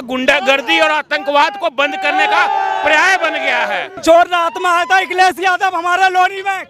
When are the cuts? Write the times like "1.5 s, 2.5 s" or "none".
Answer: 4.0 s